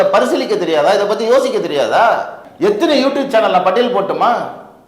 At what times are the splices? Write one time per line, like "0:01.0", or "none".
0:02.4